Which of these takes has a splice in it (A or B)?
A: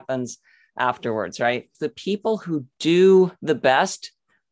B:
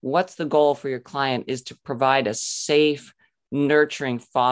A